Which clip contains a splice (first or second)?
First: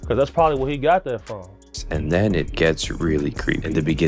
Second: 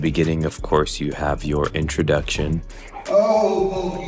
first